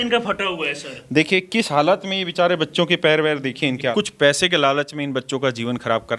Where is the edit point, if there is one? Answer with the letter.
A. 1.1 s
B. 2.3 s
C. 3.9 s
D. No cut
C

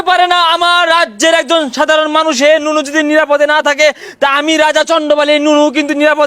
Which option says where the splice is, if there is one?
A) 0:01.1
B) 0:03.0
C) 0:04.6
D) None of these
D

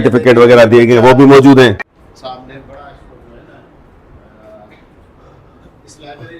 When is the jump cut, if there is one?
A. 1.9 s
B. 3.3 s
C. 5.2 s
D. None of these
A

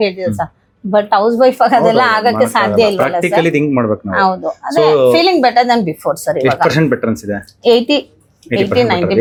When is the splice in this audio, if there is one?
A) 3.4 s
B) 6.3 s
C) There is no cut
C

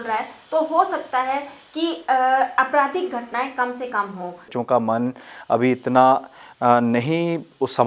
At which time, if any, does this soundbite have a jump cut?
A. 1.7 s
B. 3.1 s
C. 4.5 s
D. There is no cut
C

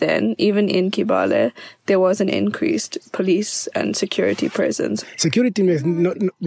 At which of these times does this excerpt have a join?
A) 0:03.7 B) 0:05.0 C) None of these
B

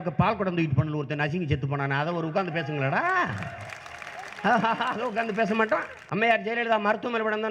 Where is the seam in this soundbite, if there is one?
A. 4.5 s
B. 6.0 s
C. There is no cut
B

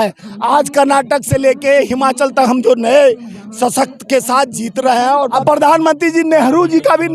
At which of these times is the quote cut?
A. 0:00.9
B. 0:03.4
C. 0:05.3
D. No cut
C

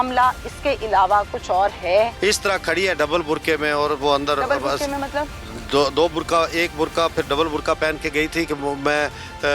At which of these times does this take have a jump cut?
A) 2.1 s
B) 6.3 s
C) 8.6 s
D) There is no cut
A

